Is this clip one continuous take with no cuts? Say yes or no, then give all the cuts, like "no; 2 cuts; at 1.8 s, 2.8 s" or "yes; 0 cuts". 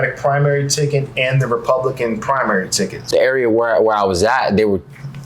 no; 1 cut; at 3.0 s